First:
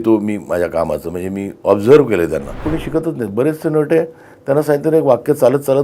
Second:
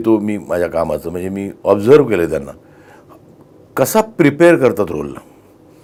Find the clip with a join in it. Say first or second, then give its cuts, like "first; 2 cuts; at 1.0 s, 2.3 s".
first; 1 cut; at 2.6 s